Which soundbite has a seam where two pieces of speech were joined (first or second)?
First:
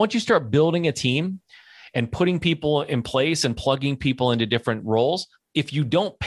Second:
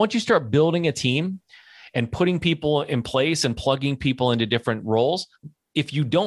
first